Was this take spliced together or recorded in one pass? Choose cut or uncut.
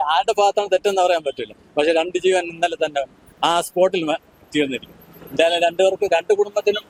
uncut